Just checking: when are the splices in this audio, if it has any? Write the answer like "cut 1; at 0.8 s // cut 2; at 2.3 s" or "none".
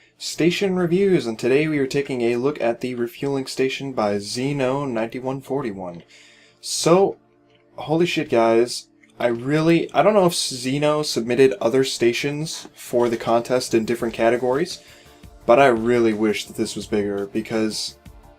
none